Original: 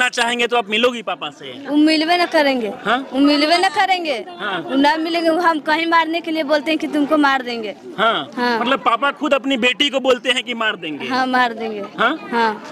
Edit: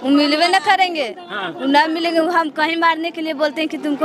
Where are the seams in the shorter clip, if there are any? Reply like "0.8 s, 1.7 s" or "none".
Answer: none

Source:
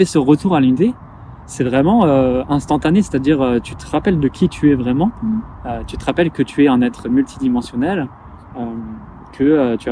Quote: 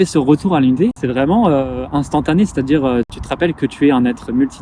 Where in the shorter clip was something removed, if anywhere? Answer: 1.0 s, 3.2 s

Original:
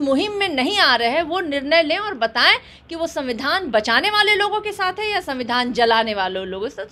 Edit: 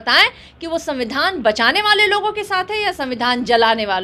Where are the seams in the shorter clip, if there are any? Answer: none

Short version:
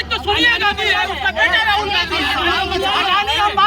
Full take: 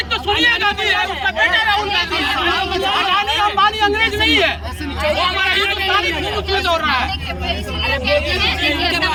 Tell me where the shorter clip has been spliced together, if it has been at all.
none

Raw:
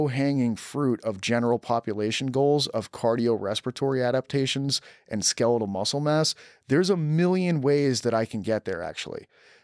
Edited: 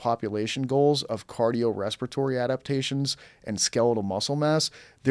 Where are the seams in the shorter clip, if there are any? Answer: none

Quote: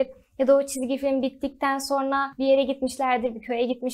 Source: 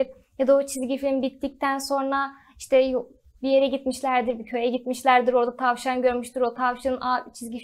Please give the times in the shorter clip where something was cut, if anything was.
2.3 s

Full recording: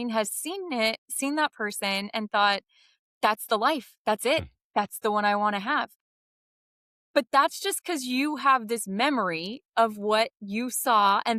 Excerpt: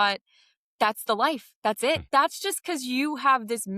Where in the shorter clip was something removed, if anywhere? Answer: 2.1 s

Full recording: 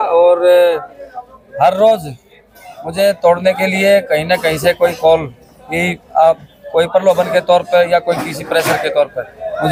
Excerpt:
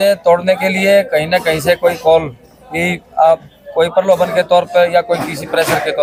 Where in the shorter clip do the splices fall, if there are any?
none

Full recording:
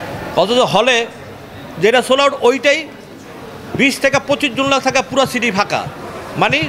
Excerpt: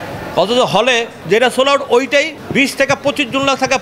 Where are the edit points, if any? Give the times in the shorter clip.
1.1 s, 2.4 s

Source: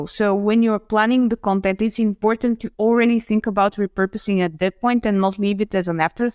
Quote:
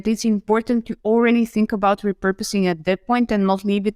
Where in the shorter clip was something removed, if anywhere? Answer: none

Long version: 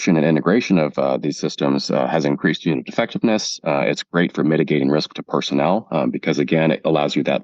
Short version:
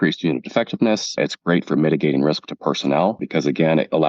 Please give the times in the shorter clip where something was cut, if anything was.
1.2 s, 3.2 s

